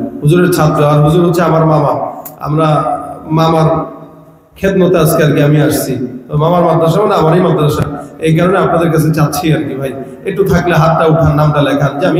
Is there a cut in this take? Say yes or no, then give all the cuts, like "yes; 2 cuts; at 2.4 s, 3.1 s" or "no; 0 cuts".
no; 0 cuts